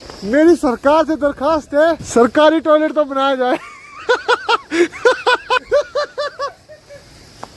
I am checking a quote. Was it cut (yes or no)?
yes